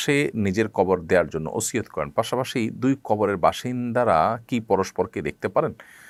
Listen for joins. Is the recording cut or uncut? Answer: uncut